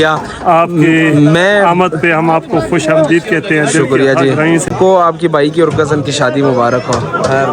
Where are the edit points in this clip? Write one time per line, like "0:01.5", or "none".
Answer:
0:04.7